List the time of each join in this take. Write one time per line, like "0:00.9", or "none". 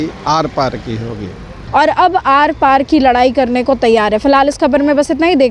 none

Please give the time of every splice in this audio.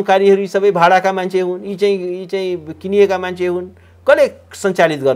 none

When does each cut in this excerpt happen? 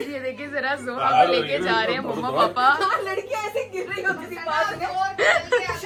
none

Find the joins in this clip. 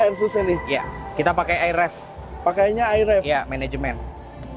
none

